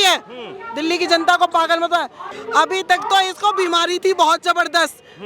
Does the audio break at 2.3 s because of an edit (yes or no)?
yes